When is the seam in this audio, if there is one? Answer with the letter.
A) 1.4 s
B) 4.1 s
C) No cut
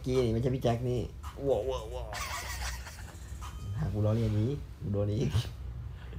C